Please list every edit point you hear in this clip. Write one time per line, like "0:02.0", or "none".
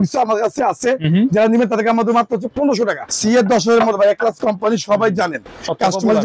0:03.0